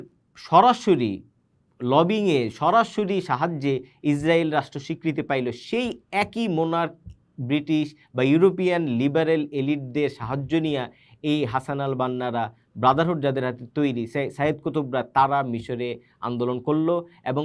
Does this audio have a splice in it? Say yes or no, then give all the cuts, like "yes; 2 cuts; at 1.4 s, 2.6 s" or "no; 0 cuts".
no; 0 cuts